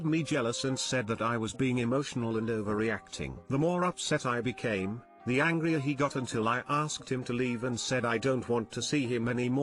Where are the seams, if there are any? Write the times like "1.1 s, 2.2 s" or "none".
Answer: none